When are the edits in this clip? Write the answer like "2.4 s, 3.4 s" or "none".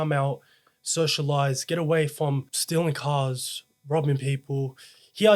2.5 s